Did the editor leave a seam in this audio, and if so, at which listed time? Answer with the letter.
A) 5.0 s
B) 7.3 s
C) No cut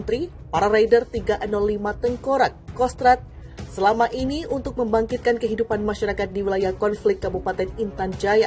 C